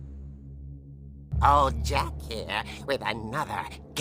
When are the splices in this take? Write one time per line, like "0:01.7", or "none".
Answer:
0:01.2